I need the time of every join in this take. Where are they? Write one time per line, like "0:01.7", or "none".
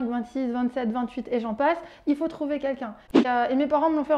0:03.3